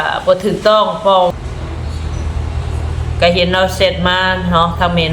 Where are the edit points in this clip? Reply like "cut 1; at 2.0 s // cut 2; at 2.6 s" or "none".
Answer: cut 1; at 1.4 s